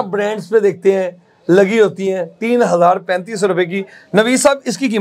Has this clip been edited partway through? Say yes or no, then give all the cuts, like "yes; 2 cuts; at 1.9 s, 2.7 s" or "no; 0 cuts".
no; 0 cuts